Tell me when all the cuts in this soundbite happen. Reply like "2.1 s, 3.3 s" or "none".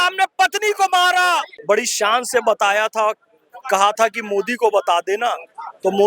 1.5 s